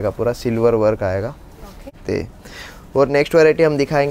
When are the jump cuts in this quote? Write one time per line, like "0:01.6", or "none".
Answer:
0:02.0